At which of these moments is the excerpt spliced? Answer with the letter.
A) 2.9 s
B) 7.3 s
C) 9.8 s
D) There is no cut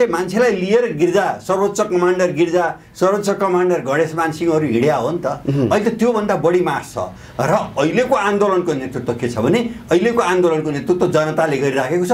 D